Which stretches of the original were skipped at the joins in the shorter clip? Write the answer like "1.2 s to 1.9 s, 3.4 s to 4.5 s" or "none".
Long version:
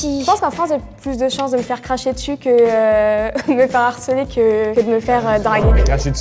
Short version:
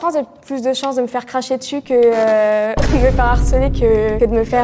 none